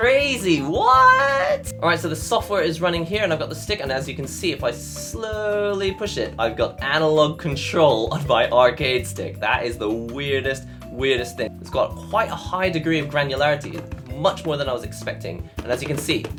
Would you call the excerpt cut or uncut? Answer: uncut